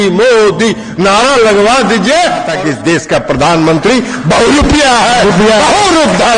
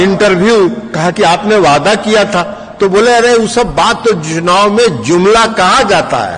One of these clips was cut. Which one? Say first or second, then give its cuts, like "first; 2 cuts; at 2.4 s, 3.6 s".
first; 1 cut; at 2.5 s